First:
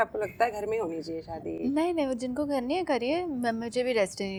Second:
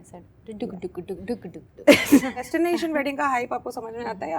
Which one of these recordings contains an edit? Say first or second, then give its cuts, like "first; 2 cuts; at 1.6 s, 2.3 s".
second; 1 cut; at 2.5 s